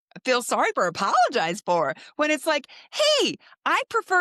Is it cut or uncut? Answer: uncut